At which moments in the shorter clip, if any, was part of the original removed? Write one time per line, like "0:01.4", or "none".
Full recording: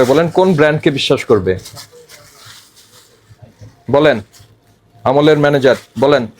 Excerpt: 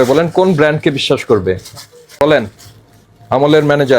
0:02.2